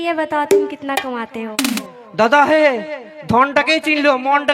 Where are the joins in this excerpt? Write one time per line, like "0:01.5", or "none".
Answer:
0:01.8